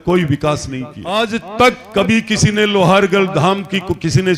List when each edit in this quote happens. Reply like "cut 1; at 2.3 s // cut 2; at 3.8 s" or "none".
cut 1; at 1.1 s